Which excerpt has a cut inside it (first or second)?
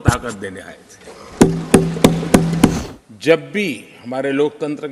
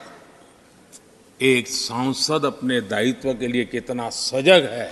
first